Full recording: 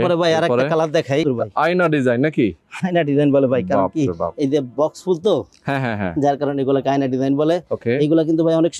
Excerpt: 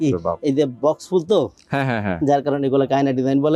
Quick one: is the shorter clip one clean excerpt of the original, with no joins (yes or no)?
yes